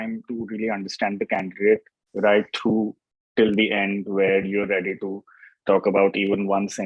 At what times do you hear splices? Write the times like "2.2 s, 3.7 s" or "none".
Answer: none